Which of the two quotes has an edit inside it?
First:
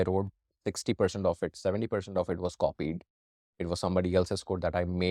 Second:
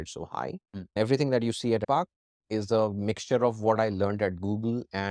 second; 2 cuts; at 0.9 s, 1.8 s

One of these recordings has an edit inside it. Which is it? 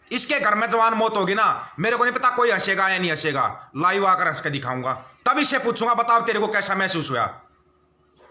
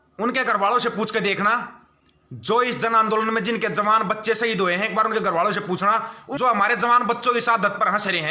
second; 1 cut; at 6.2 s

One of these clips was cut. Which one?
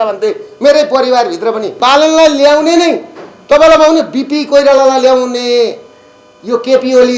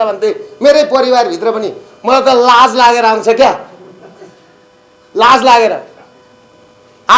first; 1 cut; at 1.8 s

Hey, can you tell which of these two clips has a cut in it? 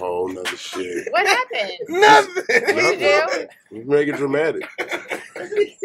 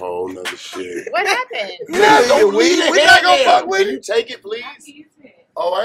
second; 1 cut; at 2.2 s

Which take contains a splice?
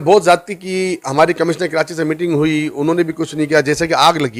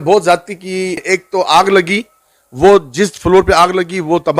second; 1 cut; at 1.0 s

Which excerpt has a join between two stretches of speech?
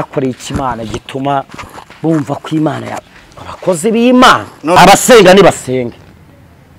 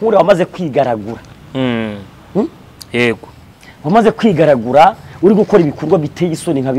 first; 1 cut; at 4.8 s

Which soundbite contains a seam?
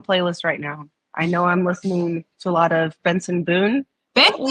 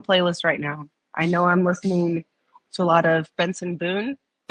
first; 1 cut; at 2.3 s

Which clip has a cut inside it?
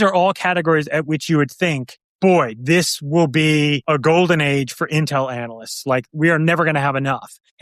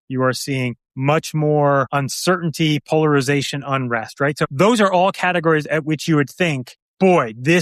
first; 2 cuts; at 3.8 s, 6.1 s

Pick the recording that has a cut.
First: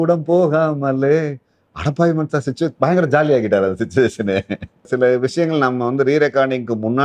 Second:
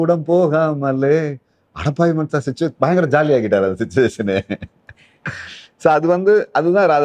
first; 1 cut; at 4.9 s

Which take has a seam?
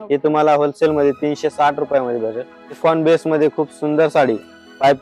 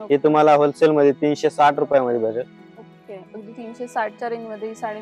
first; 1 cut; at 2.7 s

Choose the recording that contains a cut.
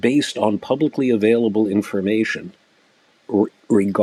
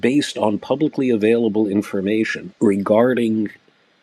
second; 1 cut; at 2.5 s

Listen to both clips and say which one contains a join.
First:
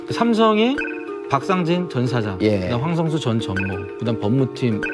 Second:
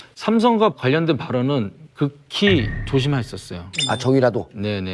second; 1 cut; at 2.1 s

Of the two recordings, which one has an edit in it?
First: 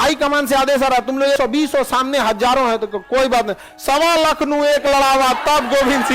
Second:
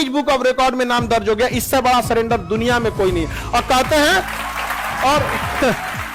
first; 1 cut; at 1.4 s

